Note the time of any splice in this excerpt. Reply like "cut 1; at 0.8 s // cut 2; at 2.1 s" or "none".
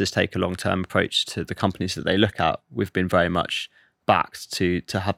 cut 1; at 1.2 s

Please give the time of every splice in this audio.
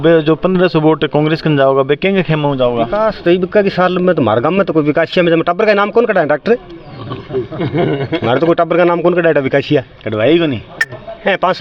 cut 1; at 2.9 s

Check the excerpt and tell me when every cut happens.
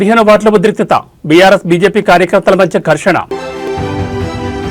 cut 1; at 3.4 s

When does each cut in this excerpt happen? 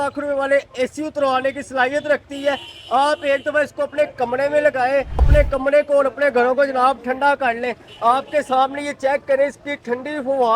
cut 1; at 5.2 s

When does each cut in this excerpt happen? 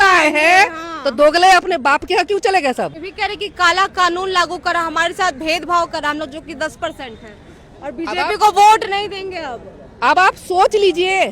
cut 1; at 3.1 s

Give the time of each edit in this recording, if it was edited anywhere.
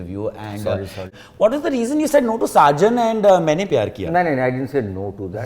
cut 1; at 1.1 s

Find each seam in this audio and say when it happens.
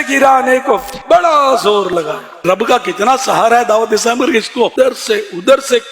cut 1; at 2.4 s // cut 2; at 4.7 s

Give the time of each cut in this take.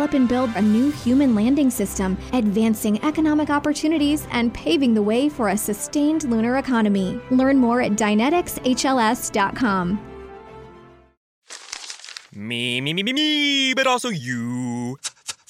cut 1; at 11.3 s

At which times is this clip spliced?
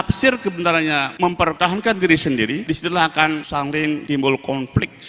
cut 1; at 1.4 s // cut 2; at 2.6 s // cut 3; at 3.7 s

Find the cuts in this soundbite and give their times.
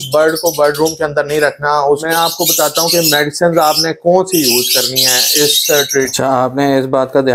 cut 1; at 2.0 s // cut 2; at 6.1 s

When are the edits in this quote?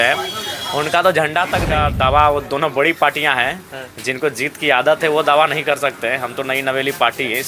cut 1; at 1.7 s

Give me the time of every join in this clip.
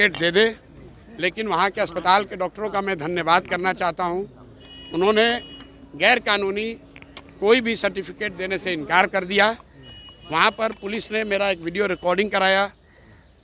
none

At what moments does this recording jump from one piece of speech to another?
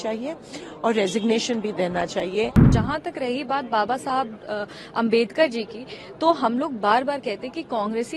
cut 1; at 2.7 s

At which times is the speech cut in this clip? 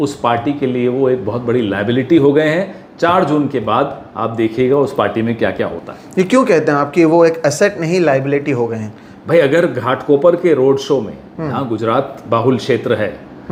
none

